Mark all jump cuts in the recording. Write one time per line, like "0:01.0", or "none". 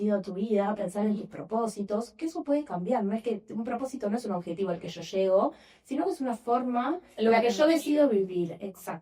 none